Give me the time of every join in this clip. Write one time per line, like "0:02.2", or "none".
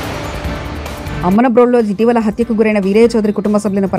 0:01.1

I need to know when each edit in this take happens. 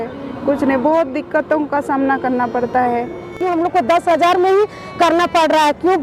0:03.3

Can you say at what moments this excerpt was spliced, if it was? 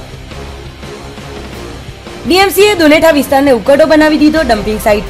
0:02.2

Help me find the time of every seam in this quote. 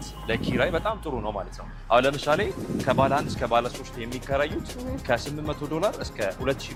none

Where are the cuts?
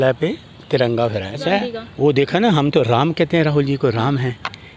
0:01.4

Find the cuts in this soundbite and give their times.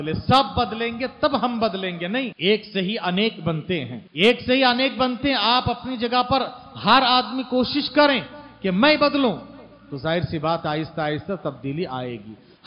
0:02.3
0:04.0

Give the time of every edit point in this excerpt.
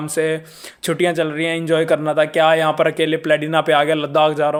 none

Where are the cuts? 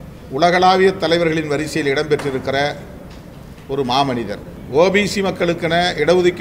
0:04.5

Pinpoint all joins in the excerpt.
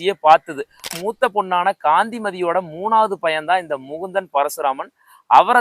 0:00.9

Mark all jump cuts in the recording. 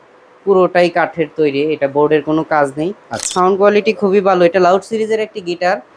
0:03.2

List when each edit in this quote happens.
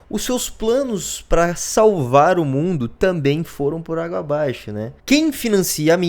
0:04.9

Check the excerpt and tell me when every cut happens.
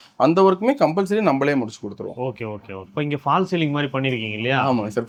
none

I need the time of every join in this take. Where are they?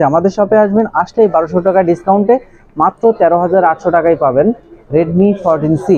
none

